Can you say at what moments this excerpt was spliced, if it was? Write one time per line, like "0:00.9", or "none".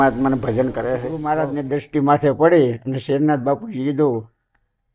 0:01.2